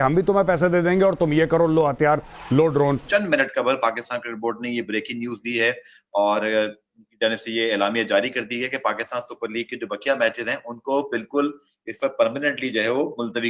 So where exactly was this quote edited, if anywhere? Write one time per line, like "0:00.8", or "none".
0:03.0